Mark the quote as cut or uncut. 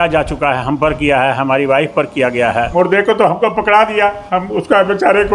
cut